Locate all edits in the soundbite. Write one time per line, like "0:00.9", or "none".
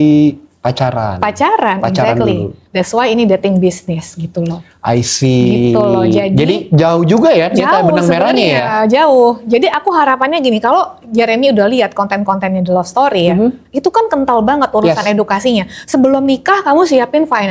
none